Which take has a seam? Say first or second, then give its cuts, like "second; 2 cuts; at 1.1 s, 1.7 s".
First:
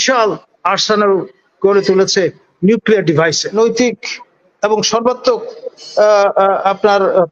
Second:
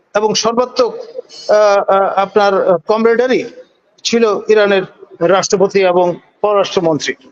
first; 1 cut; at 3.6 s